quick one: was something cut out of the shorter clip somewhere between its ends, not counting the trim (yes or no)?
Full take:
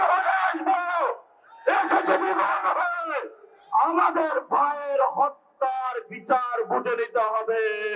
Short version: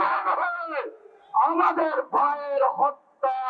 no